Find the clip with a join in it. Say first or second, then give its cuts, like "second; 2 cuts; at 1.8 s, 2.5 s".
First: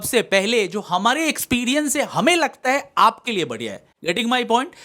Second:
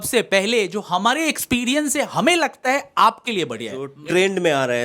second; 1 cut; at 3.9 s